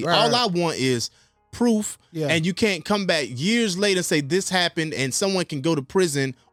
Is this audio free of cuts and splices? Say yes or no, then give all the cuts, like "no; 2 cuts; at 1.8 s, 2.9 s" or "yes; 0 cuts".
yes; 0 cuts